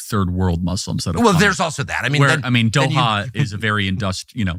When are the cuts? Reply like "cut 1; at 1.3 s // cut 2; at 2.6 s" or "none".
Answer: none